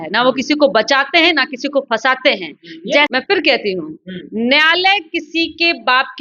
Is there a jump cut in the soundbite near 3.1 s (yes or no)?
yes